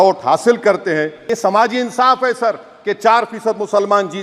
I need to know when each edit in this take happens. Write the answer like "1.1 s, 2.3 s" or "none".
1.2 s